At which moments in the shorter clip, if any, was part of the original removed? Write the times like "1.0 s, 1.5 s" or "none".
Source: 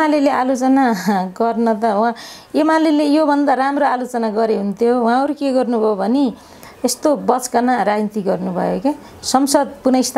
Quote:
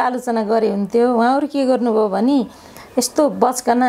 none